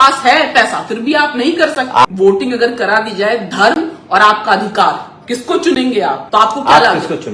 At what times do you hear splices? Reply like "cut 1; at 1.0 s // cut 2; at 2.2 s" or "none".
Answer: cut 1; at 2.1 s // cut 2; at 6.2 s